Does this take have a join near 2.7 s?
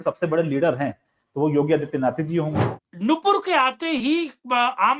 yes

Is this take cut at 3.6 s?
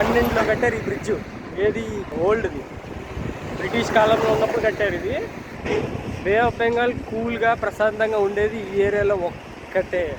no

